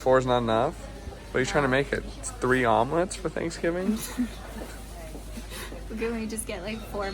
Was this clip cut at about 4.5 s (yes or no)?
no